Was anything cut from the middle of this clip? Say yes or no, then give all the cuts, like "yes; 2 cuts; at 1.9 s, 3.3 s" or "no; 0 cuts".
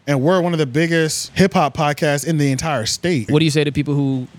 yes; 2 cuts; at 1.2 s, 3.3 s